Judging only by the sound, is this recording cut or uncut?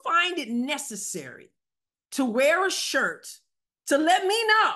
uncut